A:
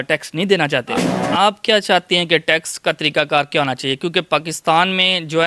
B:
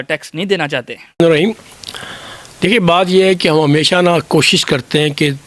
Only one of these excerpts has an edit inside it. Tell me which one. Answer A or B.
A